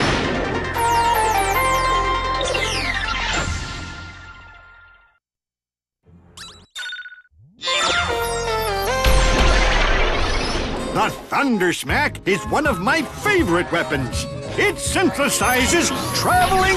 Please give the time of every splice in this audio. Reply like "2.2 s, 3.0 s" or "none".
0.9 s